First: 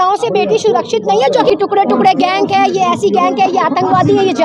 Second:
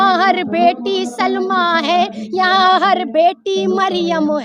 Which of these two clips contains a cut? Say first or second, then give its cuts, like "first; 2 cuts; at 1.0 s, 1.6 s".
first; 1 cut; at 1.5 s